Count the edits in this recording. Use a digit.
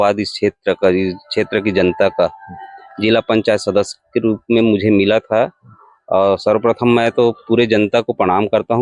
0